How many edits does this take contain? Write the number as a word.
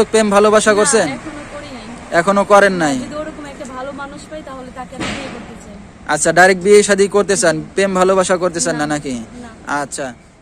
zero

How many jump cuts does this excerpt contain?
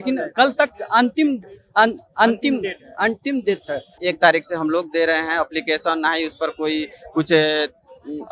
one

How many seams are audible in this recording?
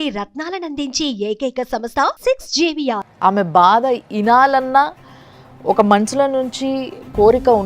one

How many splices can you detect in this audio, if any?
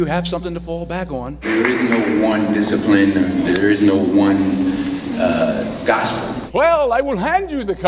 two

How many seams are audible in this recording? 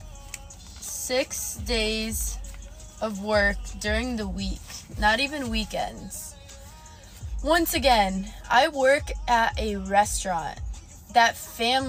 zero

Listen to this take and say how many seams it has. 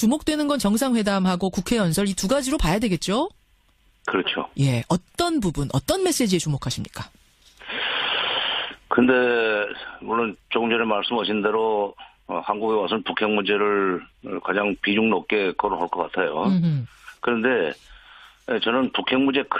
one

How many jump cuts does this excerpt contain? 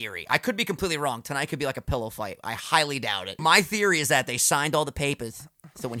one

